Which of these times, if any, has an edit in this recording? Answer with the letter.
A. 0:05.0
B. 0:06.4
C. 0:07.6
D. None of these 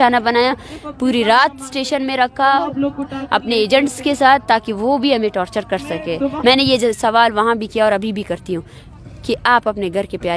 B